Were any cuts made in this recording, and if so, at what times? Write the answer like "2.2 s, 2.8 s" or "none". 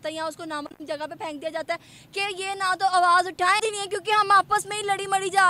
3.6 s